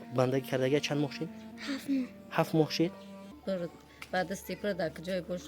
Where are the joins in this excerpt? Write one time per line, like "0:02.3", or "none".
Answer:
0:03.2